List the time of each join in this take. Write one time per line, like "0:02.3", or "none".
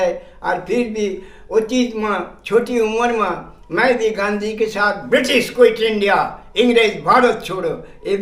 none